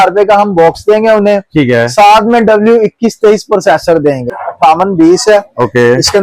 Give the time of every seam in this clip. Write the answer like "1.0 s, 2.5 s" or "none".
4.4 s

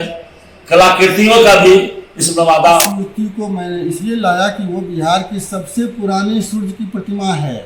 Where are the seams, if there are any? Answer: 2.9 s

